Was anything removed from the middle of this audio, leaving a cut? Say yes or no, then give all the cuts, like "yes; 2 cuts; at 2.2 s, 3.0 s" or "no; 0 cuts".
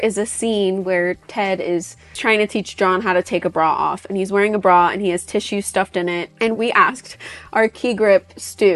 yes; 1 cut; at 6.5 s